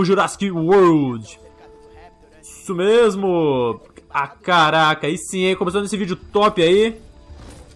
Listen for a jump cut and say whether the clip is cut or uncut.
uncut